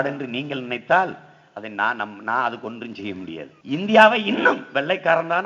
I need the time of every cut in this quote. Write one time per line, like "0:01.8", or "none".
0:03.5